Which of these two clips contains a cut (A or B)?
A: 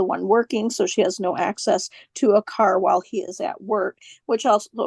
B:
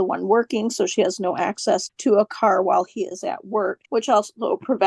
B